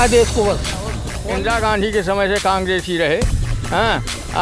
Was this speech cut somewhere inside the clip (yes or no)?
yes